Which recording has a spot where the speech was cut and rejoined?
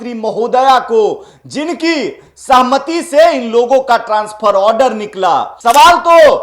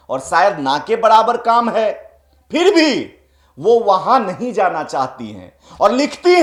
first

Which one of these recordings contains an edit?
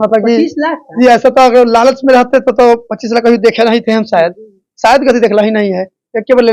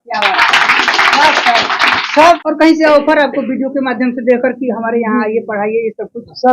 second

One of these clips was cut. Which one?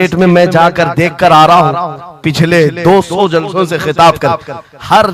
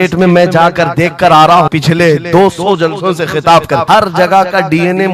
second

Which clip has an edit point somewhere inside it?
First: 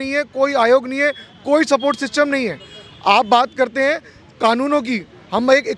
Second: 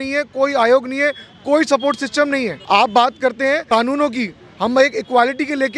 second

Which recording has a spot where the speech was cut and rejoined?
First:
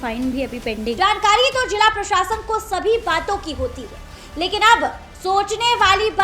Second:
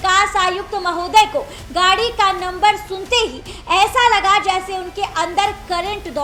first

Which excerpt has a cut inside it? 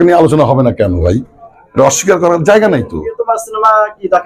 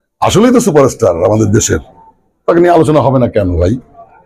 first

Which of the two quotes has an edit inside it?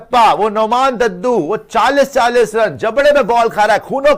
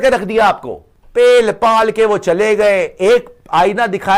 second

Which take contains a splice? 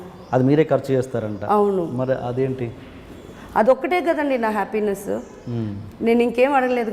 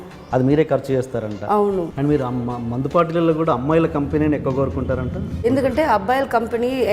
second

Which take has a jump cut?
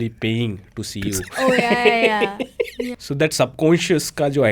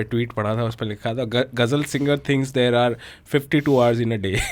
first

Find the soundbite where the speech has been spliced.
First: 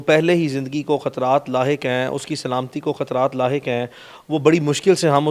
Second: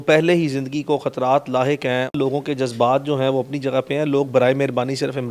second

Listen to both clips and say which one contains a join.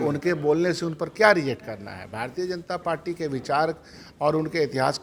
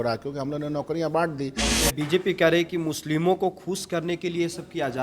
second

